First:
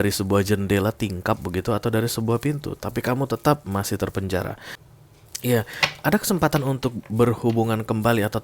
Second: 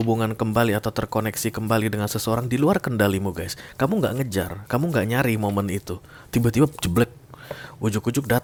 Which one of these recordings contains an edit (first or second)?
first